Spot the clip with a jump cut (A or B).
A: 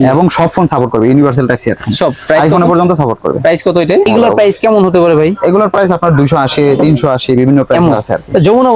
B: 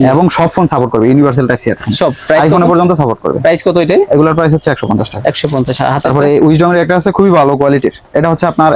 A